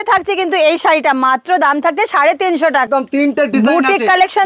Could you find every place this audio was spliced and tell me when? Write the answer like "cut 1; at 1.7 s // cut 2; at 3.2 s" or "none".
cut 1; at 2.9 s